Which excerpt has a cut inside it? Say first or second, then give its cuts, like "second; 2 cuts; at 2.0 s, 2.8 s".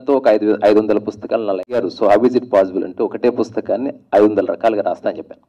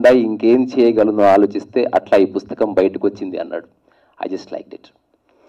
first; 1 cut; at 1.8 s